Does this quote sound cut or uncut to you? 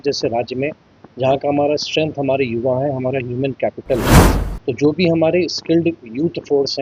uncut